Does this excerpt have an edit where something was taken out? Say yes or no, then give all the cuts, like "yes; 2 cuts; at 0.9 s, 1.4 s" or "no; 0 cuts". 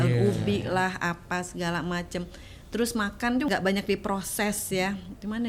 yes; 1 cut; at 3.5 s